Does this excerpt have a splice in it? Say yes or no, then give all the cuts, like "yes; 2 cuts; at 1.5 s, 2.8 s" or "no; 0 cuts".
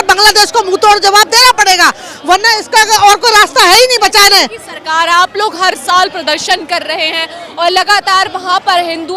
no; 0 cuts